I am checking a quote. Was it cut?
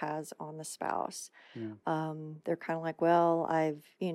no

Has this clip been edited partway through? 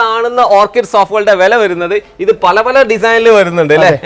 no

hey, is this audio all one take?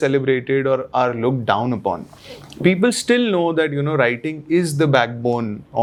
yes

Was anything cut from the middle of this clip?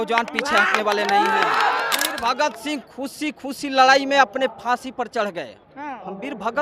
yes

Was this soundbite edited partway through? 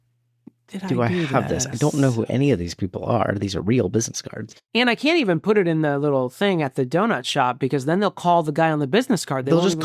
no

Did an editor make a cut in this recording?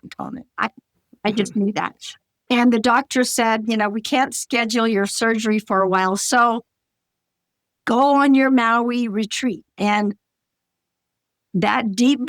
yes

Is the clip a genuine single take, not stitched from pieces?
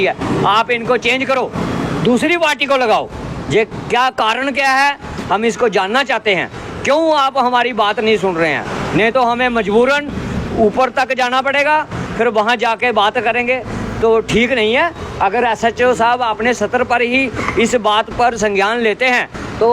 yes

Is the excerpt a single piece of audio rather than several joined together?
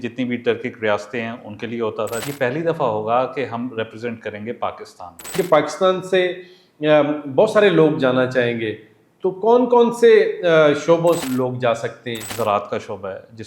no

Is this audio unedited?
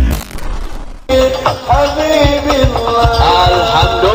yes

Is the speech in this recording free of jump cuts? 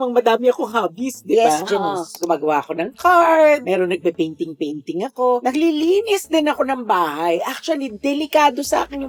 yes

